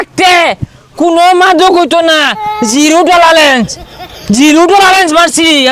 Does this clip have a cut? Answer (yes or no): no